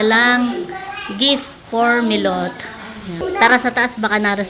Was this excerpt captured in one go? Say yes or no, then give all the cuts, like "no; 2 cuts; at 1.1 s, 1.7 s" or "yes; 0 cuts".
no; 1 cut; at 3.2 s